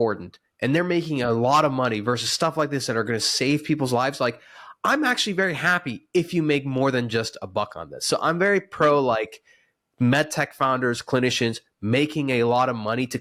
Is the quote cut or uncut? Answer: uncut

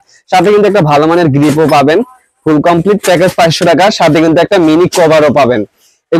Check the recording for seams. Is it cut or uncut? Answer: uncut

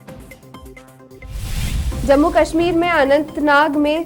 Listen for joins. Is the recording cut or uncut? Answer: uncut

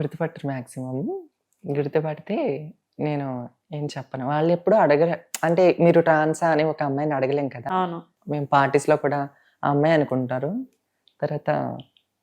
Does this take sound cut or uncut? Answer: cut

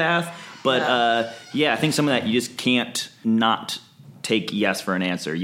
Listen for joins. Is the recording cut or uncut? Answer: cut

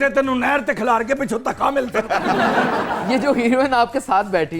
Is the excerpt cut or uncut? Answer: uncut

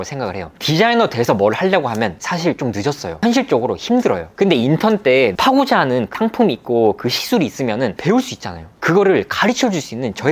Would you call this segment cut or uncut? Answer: uncut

